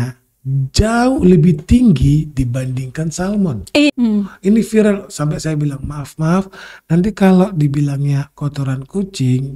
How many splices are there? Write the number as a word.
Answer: one